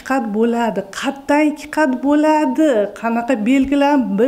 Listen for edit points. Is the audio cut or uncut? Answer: uncut